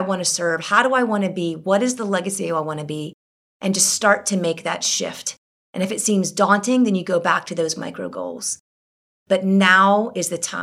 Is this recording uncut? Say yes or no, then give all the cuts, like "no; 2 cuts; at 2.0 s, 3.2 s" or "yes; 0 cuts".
no; 1 cut; at 9.0 s